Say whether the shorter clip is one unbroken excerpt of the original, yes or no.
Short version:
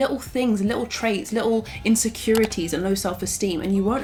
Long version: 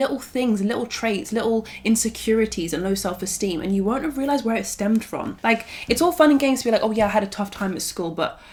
yes